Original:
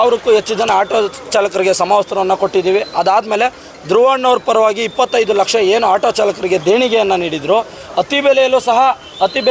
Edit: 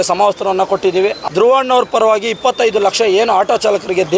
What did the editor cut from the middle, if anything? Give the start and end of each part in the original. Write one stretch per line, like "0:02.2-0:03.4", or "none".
0:02.9-0:03.8